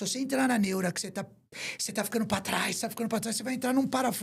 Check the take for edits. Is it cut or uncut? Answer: uncut